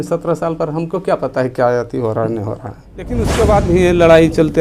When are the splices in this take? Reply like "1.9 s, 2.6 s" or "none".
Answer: 3.2 s